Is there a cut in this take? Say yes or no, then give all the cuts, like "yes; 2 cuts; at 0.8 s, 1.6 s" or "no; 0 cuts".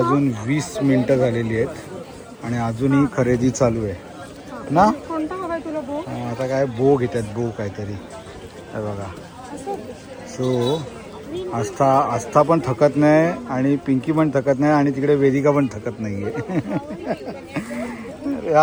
no; 0 cuts